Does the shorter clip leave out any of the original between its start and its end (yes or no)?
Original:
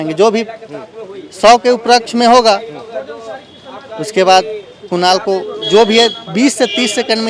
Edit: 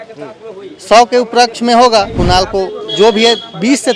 yes